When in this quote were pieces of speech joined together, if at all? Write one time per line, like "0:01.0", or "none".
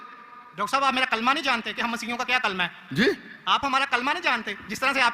none